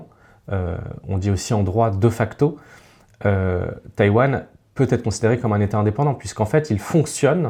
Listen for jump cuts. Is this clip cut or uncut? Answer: uncut